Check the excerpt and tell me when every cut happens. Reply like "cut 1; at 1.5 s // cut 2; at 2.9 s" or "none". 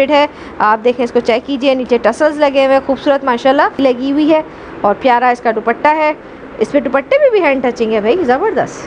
cut 1; at 3.7 s